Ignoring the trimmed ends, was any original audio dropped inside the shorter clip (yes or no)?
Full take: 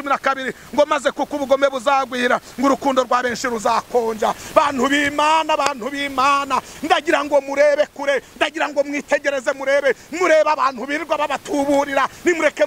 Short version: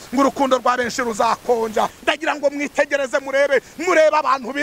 yes